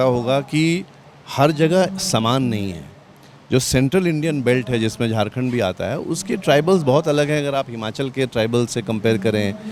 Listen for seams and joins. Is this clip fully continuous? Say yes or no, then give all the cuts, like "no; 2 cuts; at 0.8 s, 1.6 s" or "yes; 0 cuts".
yes; 0 cuts